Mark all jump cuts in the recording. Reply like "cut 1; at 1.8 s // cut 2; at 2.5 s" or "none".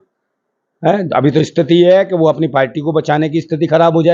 none